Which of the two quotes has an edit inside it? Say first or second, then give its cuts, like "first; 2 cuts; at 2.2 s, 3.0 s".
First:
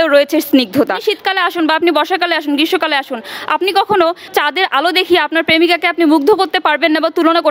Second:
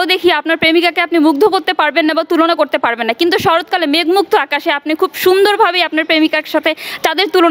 first; 1 cut; at 1.0 s